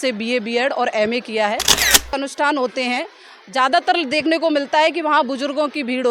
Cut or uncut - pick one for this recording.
cut